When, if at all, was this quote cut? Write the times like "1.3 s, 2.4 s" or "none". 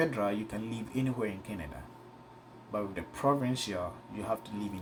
none